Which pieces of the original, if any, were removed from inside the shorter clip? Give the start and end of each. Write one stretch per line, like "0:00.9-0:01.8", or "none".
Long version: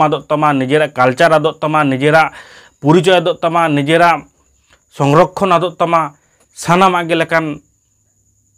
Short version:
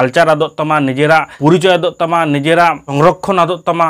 0:02.3-0:02.7
0:04.3-0:05.0